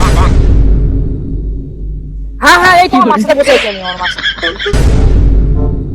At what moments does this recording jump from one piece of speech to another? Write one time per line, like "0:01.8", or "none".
0:04.7